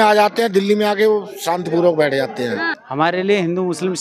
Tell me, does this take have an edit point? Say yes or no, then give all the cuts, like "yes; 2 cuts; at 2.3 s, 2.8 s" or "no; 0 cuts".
yes; 1 cut; at 2.8 s